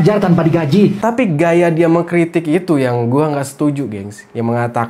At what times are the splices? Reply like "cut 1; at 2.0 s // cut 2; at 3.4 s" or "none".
cut 1; at 1.0 s